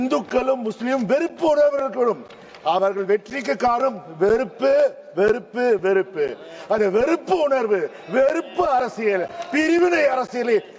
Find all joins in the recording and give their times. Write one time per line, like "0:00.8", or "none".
none